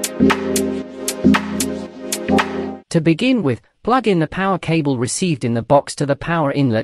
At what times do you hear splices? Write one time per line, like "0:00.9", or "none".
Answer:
0:02.8